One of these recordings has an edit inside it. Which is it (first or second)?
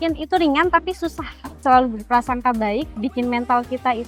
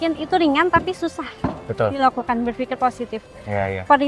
first